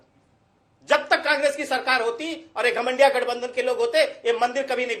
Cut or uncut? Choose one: uncut